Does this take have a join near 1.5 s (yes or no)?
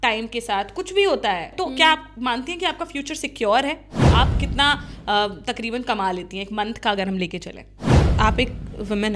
yes